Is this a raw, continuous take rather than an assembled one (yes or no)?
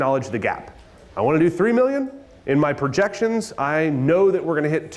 yes